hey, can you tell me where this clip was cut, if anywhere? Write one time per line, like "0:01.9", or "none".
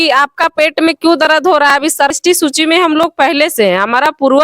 0:02.2